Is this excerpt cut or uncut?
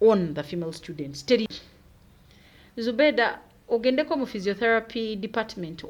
cut